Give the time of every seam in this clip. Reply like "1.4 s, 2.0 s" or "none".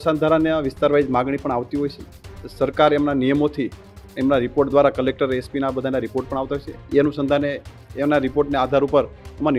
none